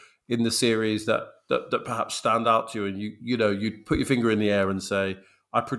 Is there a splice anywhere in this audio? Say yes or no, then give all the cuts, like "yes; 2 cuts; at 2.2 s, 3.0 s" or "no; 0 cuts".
no; 0 cuts